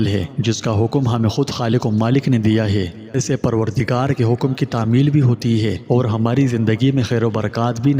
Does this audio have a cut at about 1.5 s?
no; 1 cut; at 3.2 s

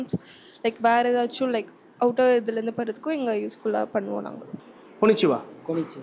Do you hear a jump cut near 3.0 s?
no; 1 cut; at 4.4 s

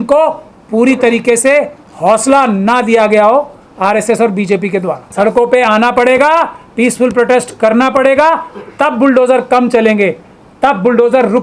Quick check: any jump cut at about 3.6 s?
no; 1 cut; at 5.0 s

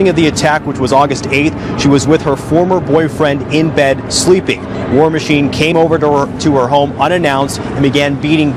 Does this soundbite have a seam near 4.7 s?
yes; 1 cut; at 4.7 s

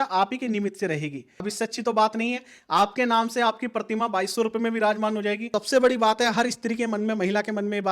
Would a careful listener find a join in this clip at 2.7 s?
no; 2 cuts; at 1.5 s, 5.5 s

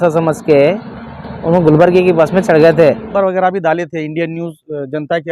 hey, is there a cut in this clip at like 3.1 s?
yes; 1 cut; at 3.1 s

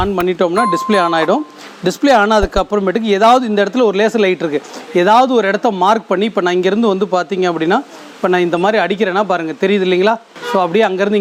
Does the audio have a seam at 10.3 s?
no; 0 cuts

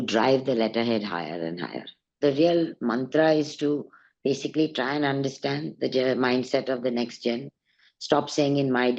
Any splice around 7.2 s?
no; 1 cut; at 2.0 s

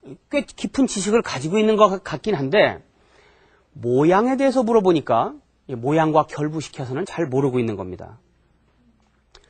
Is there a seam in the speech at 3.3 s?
yes; 1 cut; at 3.3 s

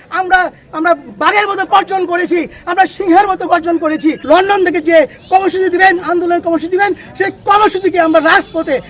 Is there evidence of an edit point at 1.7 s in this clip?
no; 1 cut; at 4.2 s

